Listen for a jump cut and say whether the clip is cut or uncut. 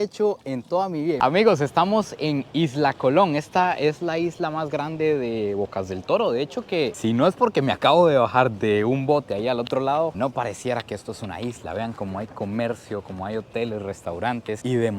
cut